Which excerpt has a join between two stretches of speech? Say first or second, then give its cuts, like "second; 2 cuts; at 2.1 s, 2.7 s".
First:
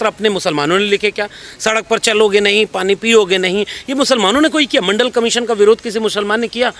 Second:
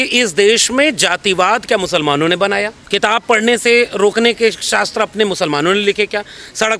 second; 1 cut; at 2.8 s